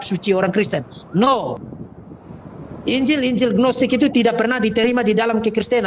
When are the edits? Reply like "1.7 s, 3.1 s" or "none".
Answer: 1.6 s